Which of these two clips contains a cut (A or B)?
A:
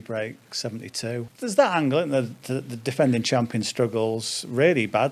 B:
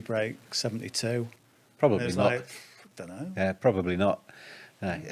A